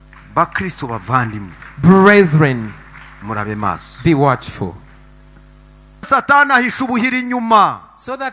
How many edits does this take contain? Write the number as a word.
one